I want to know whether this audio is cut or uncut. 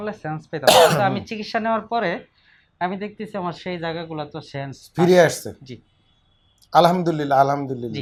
uncut